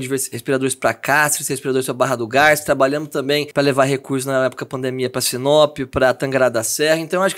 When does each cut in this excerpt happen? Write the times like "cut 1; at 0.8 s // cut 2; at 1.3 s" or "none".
cut 1; at 3.5 s